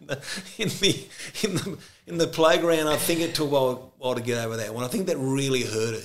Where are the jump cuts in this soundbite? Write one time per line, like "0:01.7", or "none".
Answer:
none